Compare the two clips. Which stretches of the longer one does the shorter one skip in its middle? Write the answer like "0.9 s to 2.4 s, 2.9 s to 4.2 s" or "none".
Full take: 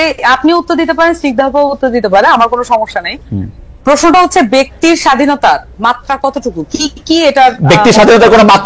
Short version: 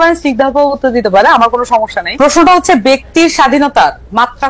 3.0 s to 3.7 s